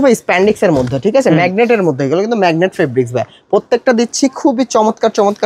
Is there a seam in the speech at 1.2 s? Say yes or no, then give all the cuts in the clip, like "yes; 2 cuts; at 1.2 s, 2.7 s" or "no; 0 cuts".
no; 0 cuts